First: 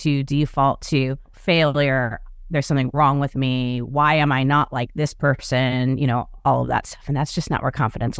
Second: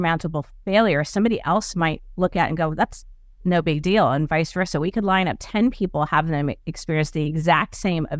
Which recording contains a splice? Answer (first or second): first